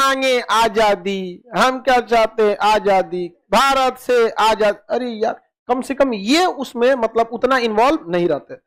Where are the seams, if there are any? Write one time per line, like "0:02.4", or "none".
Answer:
none